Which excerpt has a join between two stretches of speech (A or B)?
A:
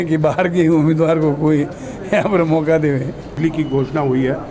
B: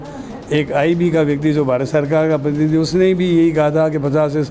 A